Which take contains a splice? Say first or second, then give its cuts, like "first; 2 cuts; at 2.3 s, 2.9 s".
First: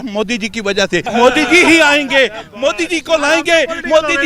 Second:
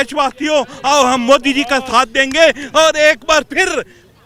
first; 1 cut; at 1.1 s